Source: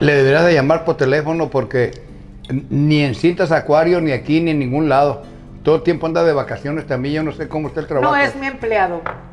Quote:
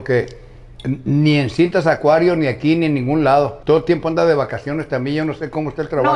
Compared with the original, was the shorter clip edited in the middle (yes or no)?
yes